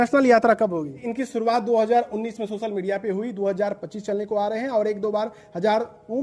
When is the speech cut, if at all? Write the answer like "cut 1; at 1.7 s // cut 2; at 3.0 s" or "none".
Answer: cut 1; at 1.0 s